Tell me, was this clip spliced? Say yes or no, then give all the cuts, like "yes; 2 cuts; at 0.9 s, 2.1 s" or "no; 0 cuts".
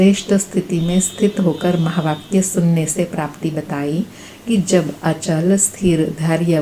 no; 0 cuts